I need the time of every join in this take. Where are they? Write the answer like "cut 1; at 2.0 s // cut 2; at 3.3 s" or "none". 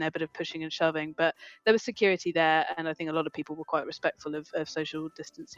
none